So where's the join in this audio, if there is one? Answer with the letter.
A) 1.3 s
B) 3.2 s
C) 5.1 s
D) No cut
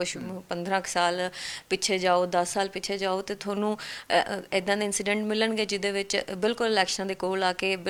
D